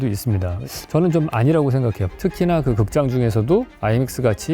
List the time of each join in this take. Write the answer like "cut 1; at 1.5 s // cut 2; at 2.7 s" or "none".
cut 1; at 2.0 s